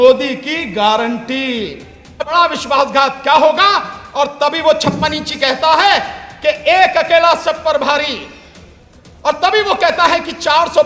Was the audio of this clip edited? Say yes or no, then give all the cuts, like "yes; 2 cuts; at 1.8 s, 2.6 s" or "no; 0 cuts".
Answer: yes; 1 cut; at 2.3 s